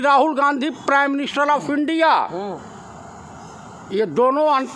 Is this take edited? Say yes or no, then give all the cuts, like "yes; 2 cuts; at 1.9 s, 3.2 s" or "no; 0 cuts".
no; 0 cuts